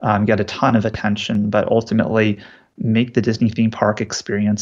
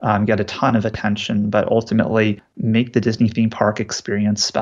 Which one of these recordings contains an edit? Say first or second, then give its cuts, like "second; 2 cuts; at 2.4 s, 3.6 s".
second; 1 cut; at 2.5 s